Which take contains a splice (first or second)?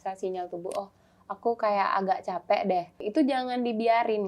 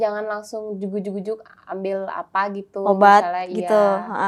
first